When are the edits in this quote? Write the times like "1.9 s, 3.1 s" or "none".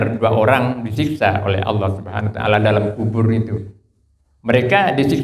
none